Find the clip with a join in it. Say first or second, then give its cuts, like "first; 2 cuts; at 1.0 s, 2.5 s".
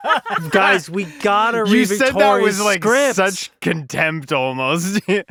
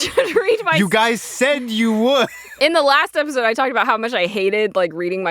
second; 1 cut; at 2.4 s